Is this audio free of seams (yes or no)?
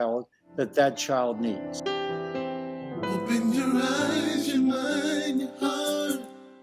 no